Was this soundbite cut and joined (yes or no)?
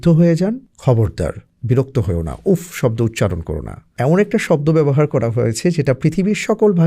yes